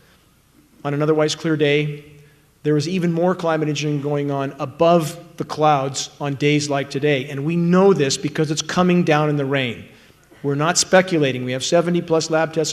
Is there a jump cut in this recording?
no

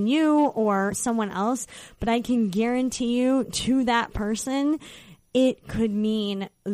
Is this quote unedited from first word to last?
yes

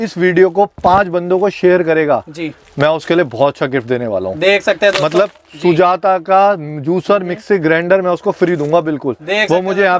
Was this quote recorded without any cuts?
yes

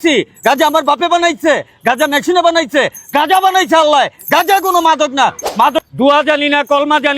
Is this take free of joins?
no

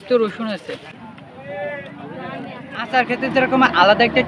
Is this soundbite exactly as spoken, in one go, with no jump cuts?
no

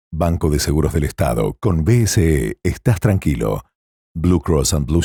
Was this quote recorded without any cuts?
yes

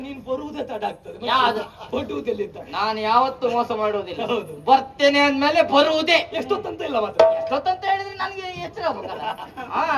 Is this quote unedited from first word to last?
yes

